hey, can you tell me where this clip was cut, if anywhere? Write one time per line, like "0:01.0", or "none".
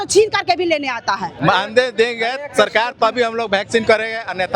0:01.4